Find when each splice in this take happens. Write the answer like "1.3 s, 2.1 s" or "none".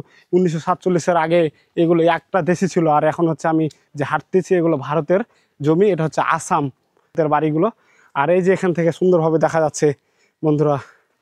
7.1 s